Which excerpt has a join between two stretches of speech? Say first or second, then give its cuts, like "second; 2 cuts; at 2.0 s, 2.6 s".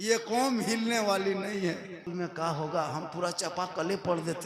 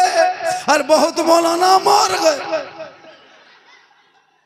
first; 1 cut; at 2.1 s